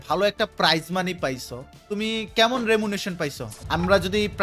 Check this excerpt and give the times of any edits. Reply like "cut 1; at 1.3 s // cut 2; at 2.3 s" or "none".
cut 1; at 1.7 s // cut 2; at 3.5 s

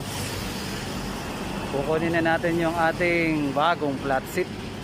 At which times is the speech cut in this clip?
none

